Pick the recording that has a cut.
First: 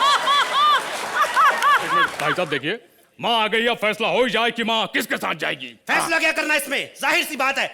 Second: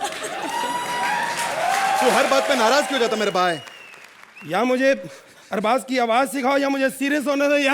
first; 1 cut; at 2.1 s

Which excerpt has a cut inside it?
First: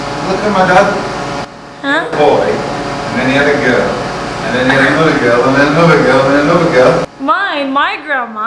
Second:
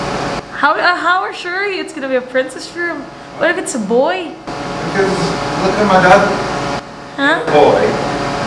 first; 1 cut; at 7.1 s

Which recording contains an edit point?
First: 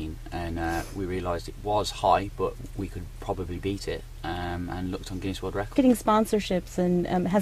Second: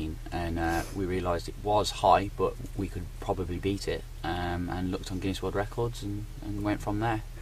second; 1 cut; at 5.8 s

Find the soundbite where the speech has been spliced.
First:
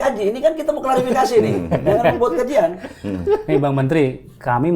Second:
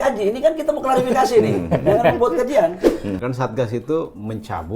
second; 1 cut; at 3.1 s

